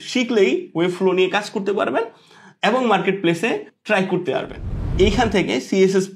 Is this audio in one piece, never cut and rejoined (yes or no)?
no